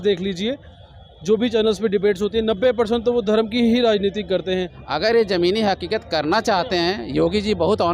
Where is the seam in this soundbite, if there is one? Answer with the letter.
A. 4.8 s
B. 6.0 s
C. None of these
A